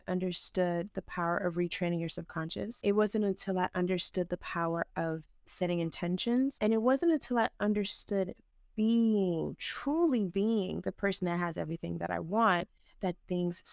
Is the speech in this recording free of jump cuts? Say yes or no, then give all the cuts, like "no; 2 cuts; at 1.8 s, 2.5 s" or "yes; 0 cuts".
no; 2 cuts; at 2.7 s, 6.5 s